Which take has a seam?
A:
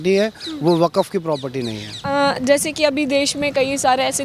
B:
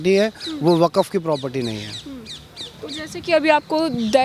A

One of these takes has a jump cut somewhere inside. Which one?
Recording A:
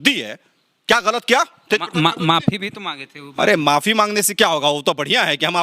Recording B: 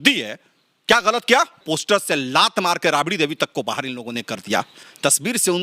B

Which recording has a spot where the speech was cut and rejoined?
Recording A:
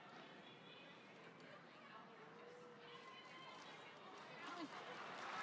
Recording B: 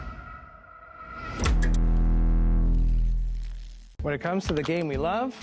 B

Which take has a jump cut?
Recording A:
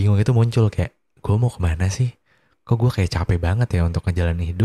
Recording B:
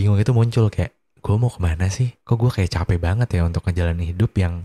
B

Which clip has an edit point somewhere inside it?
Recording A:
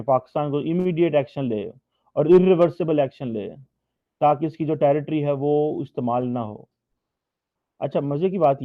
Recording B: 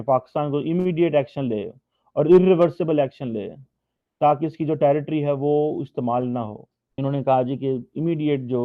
B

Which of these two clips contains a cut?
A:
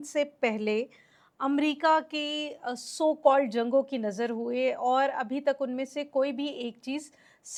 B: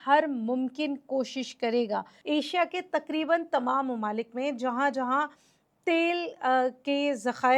B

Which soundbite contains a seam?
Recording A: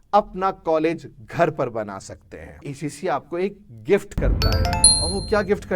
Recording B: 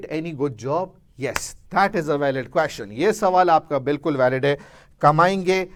A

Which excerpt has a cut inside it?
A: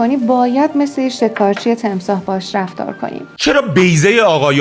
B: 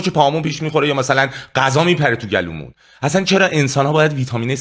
A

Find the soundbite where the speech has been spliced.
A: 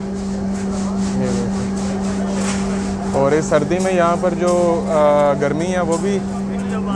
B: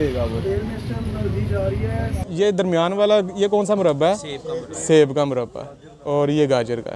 B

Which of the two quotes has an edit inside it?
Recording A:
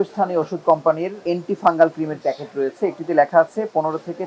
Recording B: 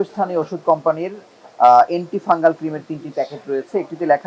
A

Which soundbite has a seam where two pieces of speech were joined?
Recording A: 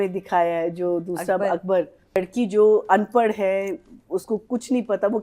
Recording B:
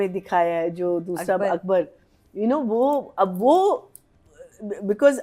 A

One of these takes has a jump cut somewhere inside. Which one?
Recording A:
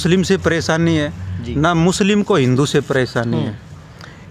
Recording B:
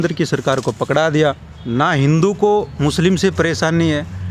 B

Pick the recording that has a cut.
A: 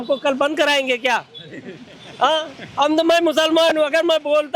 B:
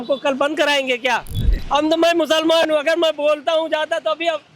B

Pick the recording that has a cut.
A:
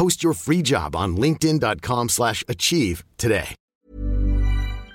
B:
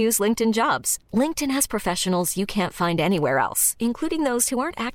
A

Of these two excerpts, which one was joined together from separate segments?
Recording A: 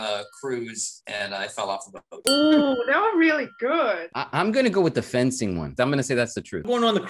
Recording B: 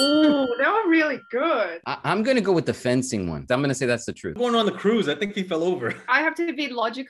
B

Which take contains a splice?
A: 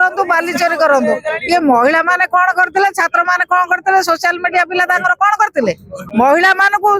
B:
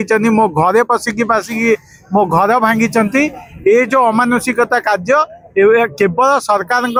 A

